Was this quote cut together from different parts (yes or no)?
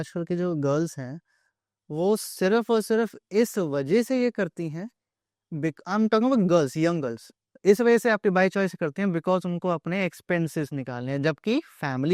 no